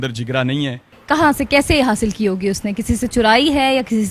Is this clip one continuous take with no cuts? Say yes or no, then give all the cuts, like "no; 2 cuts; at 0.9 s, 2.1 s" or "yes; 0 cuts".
no; 1 cut; at 1.0 s